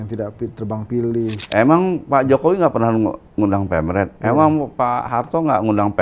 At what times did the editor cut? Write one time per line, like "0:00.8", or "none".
0:01.4